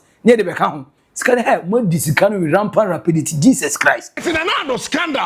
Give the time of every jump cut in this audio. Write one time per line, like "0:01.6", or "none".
0:04.2